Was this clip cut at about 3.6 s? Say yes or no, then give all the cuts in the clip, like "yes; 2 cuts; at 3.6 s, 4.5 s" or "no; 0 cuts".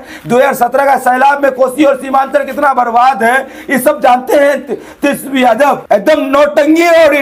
no; 1 cut; at 5.8 s